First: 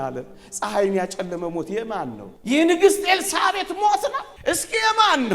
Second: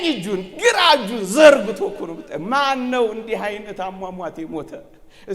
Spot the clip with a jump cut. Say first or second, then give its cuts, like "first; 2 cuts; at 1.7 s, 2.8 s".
first; 2 cuts; at 2.3 s, 4.3 s